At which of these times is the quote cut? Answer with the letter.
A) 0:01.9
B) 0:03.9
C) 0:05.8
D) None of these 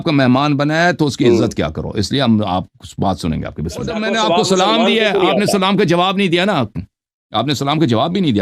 B